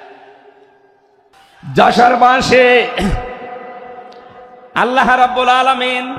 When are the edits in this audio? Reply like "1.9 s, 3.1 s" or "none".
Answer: 1.4 s